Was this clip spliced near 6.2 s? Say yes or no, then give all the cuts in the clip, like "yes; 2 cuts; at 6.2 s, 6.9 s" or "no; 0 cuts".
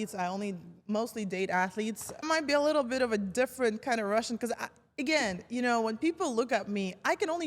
no; 1 cut; at 2.2 s